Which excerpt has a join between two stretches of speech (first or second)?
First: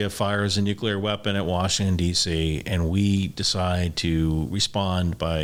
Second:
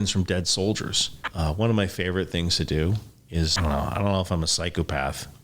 second